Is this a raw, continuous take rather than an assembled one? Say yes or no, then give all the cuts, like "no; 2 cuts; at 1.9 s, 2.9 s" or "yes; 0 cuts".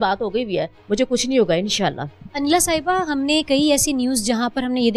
yes; 0 cuts